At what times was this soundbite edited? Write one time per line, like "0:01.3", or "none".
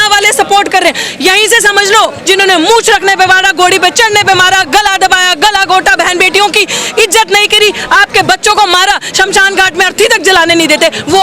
0:02.2